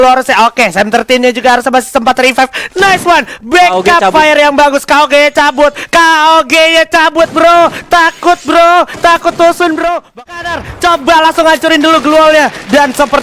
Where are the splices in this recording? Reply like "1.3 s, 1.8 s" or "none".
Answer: 10.2 s